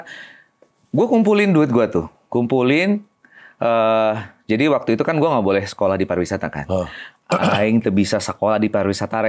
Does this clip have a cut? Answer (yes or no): no